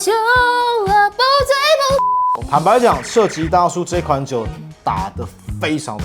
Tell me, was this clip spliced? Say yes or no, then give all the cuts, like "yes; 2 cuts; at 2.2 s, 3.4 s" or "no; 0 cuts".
yes; 1 cut; at 2.4 s